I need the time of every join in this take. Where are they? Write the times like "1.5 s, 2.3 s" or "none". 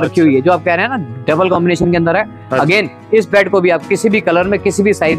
none